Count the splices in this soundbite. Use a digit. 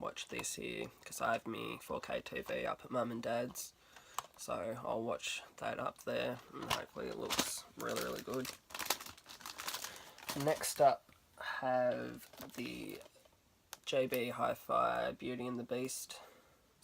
1